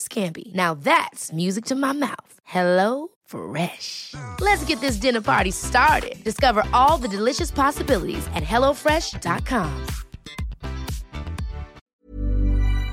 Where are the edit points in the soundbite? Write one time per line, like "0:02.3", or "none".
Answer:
0:12.0